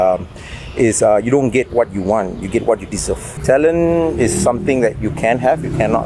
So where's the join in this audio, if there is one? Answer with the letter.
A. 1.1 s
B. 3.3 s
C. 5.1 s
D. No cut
B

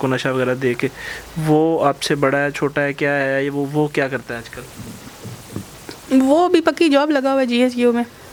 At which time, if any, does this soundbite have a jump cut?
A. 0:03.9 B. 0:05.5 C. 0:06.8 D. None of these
D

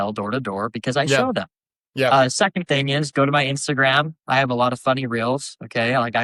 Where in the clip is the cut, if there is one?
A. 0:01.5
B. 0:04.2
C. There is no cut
C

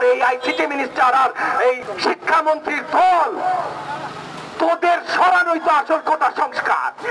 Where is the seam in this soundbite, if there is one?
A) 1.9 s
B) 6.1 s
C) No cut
A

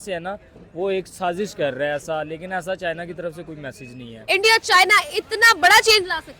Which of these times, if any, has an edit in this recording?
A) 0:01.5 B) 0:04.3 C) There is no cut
B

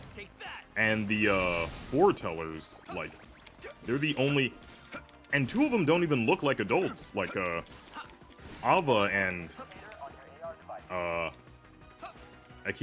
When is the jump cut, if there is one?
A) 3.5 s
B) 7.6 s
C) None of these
C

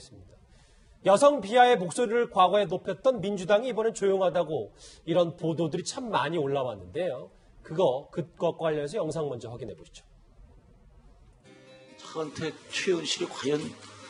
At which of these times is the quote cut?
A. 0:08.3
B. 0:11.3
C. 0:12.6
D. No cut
D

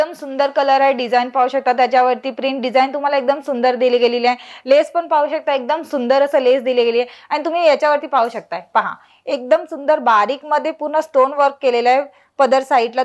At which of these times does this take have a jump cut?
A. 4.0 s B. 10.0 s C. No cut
C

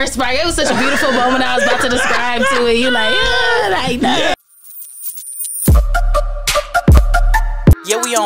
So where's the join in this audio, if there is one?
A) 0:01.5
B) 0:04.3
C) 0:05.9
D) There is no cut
B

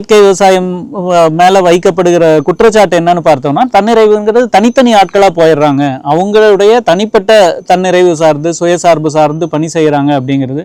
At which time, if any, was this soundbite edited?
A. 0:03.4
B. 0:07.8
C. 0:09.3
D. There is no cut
D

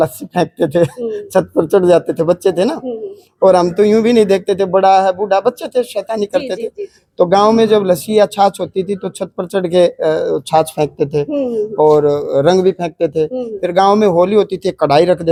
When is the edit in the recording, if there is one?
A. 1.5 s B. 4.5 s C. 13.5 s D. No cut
D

